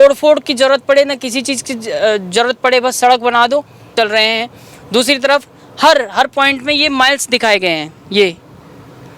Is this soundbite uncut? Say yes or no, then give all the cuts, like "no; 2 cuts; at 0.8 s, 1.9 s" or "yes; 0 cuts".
no; 1 cut; at 4.0 s